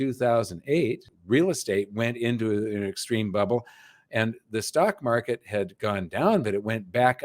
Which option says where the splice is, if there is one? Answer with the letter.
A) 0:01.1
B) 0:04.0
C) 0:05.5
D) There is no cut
A